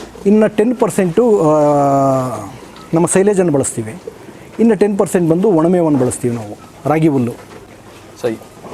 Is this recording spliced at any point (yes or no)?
no